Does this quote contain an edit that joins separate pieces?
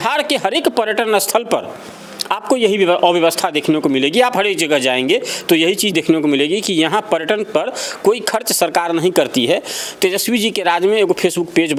no; 0 cuts

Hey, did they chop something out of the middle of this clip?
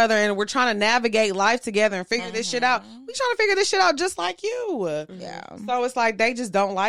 no; 0 cuts

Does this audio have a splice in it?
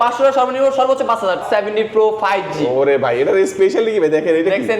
yes; 1 cut; at 1.4 s

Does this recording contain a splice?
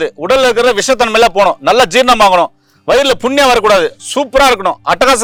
no; 0 cuts

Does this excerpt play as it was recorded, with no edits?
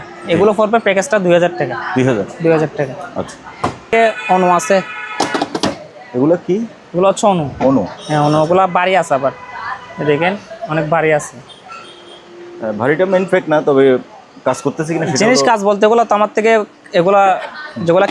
yes; 0 cuts

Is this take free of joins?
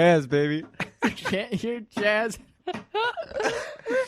no; 1 cut; at 2.5 s

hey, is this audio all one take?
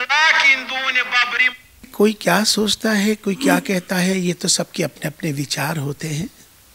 no; 1 cut; at 1.9 s

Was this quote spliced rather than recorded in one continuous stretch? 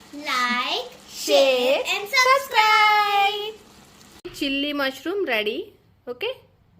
yes; 1 cut; at 4.3 s

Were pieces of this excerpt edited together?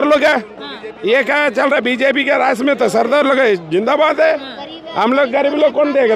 no; 0 cuts

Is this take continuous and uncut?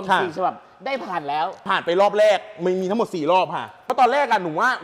no; 2 cuts; at 1.6 s, 3.8 s

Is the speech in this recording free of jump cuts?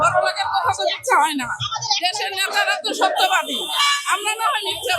yes; 0 cuts

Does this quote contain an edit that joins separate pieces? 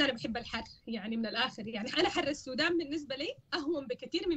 no; 0 cuts

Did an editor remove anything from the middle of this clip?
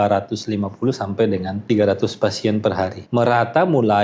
yes; 2 cuts; at 1.5 s, 3.0 s

